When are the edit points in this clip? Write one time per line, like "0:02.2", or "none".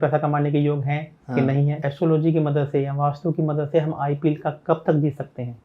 0:01.8

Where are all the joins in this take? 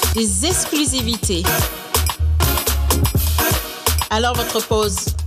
none

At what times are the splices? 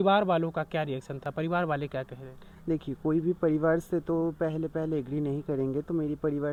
none

